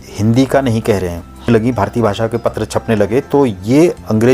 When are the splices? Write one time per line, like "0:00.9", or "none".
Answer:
0:01.5